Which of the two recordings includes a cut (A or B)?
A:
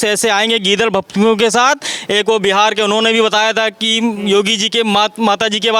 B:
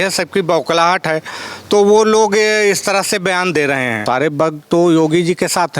B